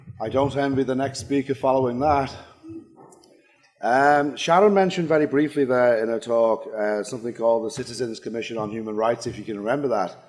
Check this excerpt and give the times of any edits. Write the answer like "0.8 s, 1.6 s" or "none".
1.4 s